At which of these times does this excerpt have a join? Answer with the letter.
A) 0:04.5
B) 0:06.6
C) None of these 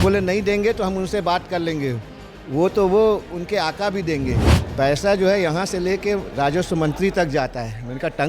A